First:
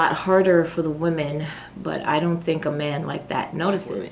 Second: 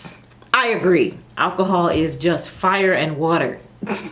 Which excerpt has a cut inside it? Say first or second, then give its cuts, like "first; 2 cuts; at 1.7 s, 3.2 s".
second; 1 cut; at 1.2 s